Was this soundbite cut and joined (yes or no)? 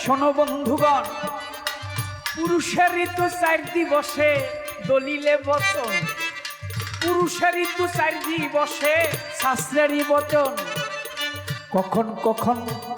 no